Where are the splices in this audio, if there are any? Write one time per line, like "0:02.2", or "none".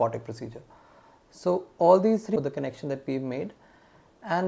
0:02.4